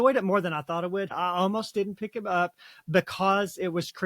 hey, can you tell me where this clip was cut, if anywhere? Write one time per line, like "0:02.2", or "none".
0:01.1